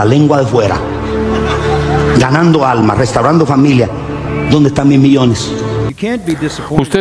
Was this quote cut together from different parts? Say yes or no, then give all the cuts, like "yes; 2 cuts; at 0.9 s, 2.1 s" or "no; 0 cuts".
yes; 1 cut; at 5.9 s